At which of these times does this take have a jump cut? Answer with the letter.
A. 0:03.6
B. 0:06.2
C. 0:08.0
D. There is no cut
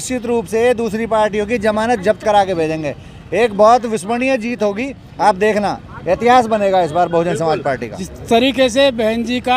C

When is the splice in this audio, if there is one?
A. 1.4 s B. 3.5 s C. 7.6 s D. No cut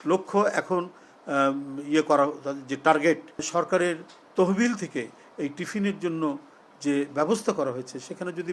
B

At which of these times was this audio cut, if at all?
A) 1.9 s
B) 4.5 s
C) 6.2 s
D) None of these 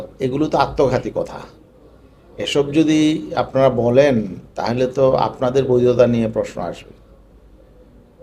D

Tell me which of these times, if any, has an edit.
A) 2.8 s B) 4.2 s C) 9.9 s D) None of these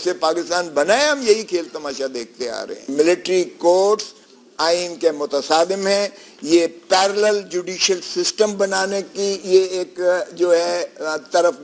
A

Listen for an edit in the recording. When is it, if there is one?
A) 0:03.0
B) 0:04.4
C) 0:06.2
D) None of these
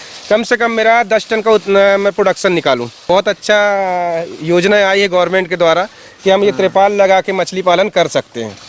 A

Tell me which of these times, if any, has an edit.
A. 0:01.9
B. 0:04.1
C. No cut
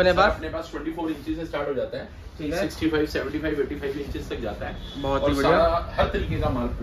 C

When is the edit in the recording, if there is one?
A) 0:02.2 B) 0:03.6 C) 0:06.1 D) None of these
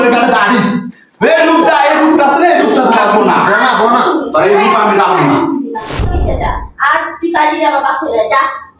C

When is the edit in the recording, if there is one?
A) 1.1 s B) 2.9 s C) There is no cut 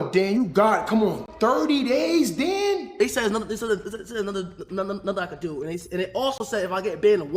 B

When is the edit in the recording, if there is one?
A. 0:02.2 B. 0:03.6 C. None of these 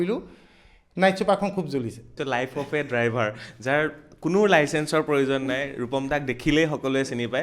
A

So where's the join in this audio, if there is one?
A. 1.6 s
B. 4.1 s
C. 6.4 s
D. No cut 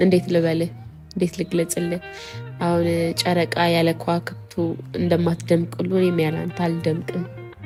D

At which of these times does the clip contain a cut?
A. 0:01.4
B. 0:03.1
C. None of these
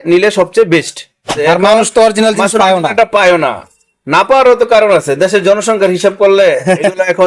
A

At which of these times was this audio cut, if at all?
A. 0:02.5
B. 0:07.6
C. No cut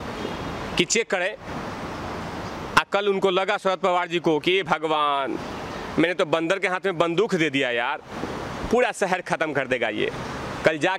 C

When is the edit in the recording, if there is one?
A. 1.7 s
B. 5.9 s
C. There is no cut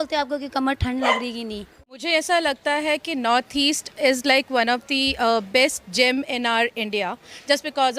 A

